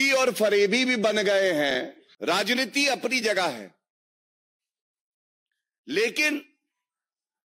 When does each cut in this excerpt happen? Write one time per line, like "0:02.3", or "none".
0:02.0